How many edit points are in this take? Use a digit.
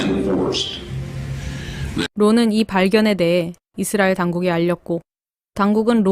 1